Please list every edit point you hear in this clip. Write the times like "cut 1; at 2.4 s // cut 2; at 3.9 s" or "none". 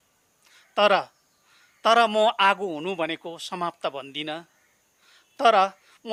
none